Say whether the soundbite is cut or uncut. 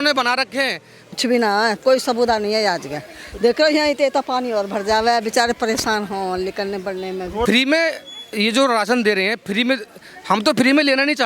cut